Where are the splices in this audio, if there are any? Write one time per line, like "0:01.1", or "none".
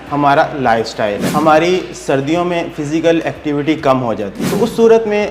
0:01.2
0:04.4